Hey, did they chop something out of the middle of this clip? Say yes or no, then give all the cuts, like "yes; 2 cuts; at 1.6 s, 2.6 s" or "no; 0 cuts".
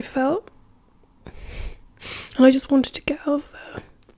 no; 0 cuts